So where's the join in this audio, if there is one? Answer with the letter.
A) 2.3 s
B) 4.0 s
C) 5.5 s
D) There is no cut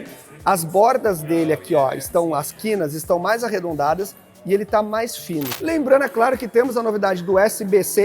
C